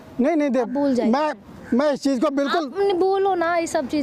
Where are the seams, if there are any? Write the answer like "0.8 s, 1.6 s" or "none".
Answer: none